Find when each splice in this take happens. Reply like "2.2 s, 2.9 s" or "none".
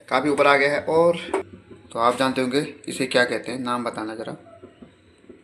1.5 s